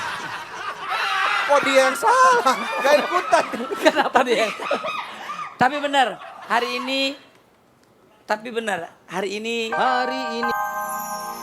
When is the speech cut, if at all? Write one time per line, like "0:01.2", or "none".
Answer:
0:10.2